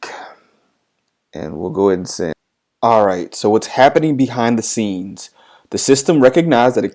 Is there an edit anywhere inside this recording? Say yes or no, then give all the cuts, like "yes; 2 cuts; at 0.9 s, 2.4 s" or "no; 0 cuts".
yes; 1 cut; at 2.4 s